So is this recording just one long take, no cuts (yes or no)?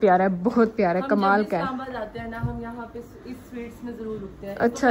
yes